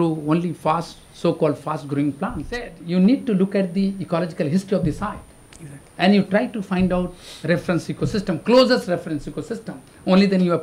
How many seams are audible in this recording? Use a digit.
1